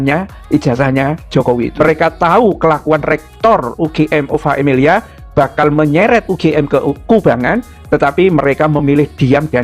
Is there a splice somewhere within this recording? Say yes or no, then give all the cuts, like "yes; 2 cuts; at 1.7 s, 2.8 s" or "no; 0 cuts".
yes; 1 cut; at 1.7 s